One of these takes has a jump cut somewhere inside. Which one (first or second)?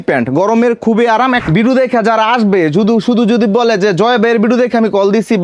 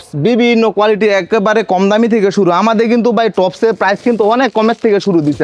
first